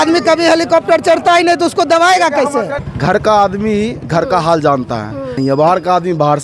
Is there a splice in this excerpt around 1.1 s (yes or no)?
no